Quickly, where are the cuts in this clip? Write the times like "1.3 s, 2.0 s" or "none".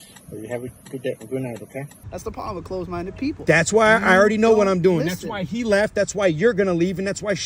2.0 s

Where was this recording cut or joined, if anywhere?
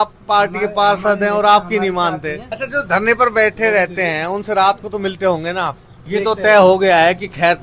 2.6 s, 6.1 s

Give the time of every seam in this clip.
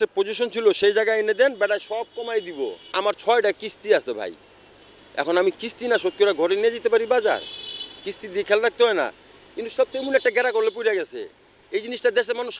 2.8 s

